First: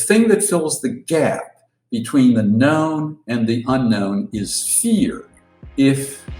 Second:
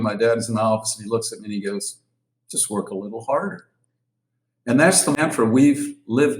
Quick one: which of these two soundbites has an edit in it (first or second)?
second